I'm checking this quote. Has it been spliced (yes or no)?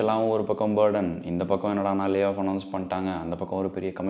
no